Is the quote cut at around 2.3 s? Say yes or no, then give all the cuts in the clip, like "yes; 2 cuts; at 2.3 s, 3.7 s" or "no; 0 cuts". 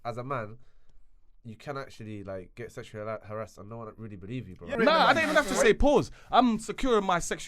no; 1 cut; at 4.7 s